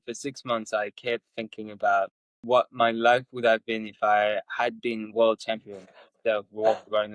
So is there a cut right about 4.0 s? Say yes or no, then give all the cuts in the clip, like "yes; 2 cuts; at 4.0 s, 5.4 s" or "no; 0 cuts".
no; 1 cut; at 2.3 s